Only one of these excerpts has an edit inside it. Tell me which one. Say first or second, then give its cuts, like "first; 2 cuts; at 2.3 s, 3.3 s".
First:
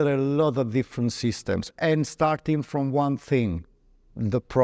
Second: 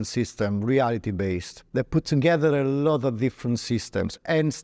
second; 1 cut; at 1.5 s